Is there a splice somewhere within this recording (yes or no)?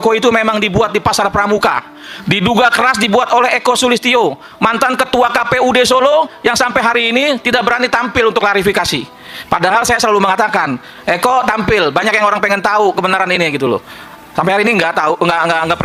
no